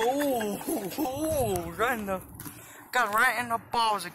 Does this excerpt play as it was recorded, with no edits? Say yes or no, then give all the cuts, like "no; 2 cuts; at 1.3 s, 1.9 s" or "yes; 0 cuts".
yes; 0 cuts